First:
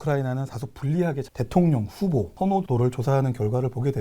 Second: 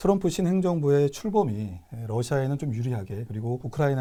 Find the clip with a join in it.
first; 2 cuts; at 1.3 s, 2.7 s

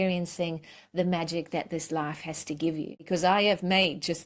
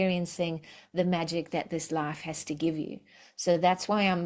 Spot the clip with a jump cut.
first; 1 cut; at 3.0 s

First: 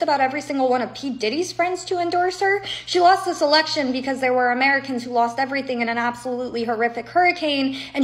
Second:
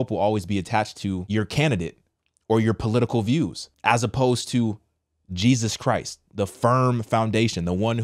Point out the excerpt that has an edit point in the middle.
second; 2 cuts; at 1.2 s, 3.7 s

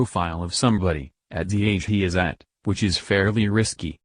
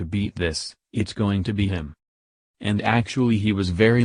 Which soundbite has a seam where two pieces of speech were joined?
second; 1 cut; at 2.6 s

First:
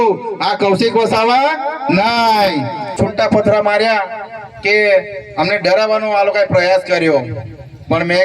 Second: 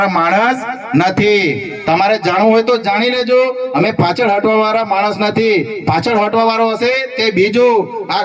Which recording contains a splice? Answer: first; 1 cut; at 2.9 s

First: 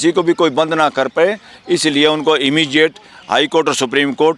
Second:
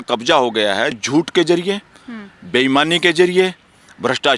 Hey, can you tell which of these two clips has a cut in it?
second; 1 cut; at 1.0 s

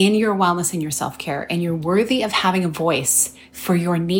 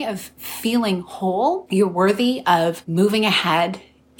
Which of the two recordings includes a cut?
second; 2 cuts; at 1.6 s, 2.8 s

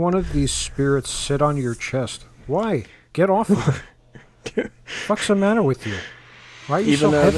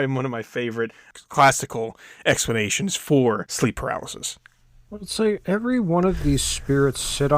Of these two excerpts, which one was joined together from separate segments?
second; 2 cuts; at 1.1 s, 3.5 s

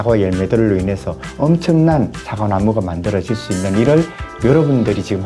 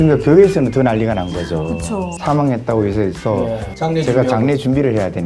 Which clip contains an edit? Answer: second; 1 cut; at 2.1 s

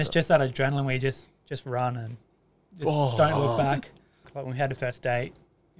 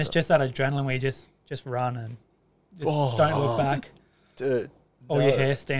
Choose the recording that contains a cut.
first; 1 cut; at 4.2 s

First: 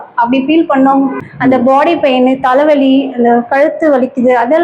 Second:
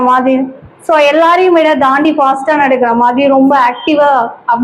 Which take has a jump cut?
first; 1 cut; at 1.3 s

